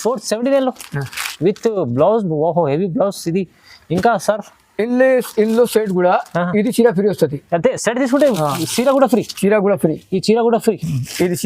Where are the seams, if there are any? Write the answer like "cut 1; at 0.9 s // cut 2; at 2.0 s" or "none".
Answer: none